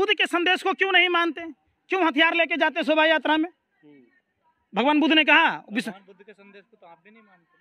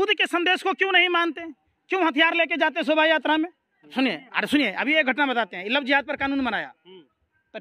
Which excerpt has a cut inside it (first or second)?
second